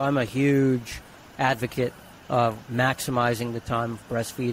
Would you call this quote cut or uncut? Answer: uncut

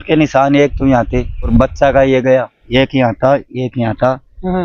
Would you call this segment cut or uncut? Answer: cut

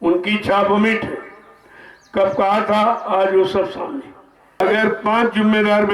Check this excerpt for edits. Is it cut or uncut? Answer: cut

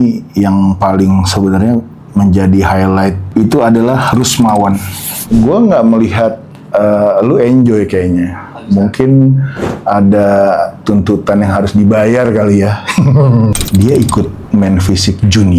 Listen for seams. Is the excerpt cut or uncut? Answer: cut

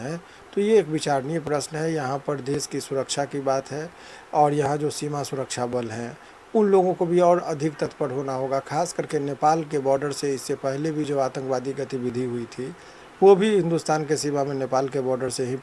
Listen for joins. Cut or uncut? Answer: uncut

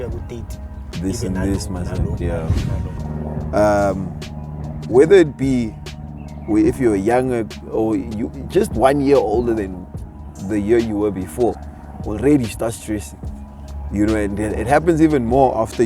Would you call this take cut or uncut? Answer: cut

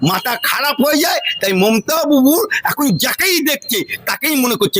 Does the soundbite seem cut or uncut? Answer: uncut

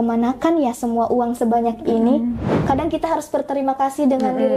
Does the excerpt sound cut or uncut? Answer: cut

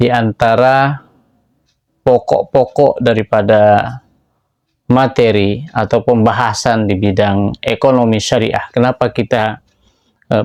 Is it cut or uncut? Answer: uncut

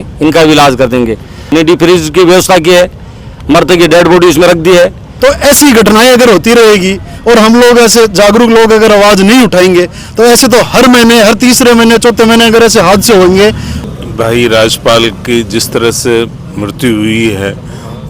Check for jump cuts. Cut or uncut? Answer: cut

